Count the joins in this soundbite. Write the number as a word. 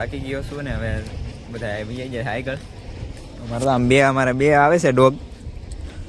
zero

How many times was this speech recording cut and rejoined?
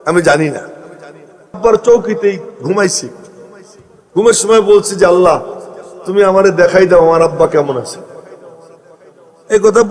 one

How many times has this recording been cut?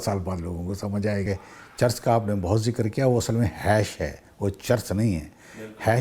one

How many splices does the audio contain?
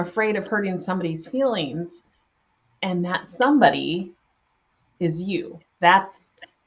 zero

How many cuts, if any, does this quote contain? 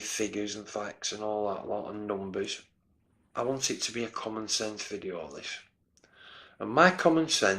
one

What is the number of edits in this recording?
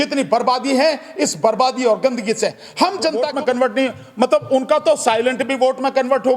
one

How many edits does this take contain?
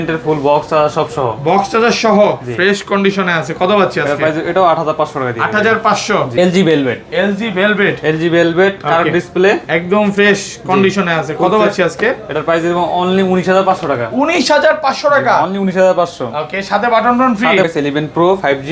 two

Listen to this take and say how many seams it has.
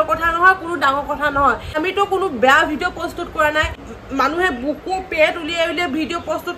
two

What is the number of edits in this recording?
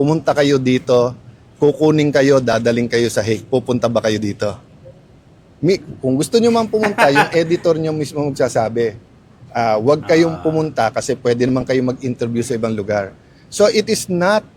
zero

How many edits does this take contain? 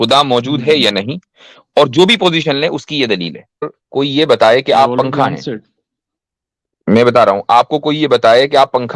one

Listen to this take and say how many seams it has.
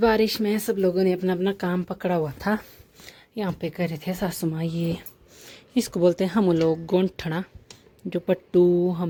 zero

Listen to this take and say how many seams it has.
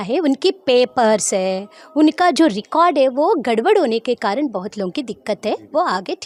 zero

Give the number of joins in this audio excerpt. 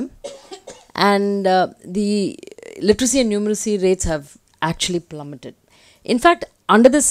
zero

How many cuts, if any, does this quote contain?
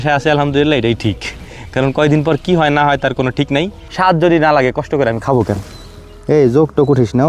one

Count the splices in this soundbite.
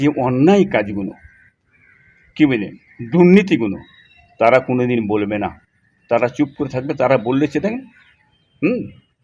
zero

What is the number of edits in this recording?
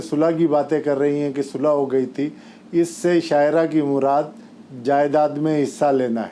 zero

